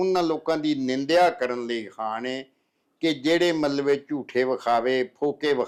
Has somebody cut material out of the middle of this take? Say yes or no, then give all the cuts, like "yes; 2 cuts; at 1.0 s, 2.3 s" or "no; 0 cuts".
no; 0 cuts